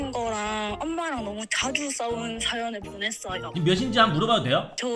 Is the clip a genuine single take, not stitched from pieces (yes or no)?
no